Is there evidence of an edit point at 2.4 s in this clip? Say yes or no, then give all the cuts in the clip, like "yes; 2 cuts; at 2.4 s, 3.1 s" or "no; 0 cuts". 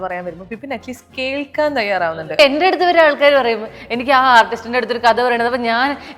yes; 1 cut; at 2.4 s